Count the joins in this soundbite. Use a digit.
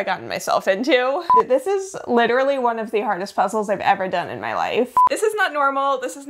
2